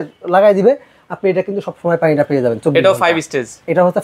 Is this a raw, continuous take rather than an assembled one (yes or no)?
yes